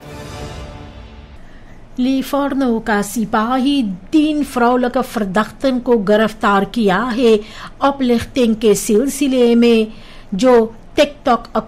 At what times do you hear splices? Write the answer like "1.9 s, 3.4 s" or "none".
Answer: 1.4 s